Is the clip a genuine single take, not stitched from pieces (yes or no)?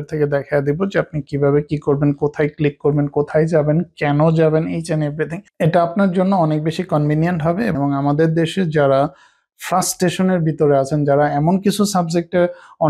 yes